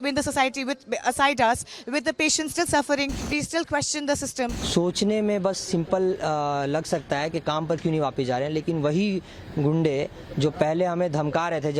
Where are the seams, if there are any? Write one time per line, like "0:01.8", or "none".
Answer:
0:03.2
0:04.6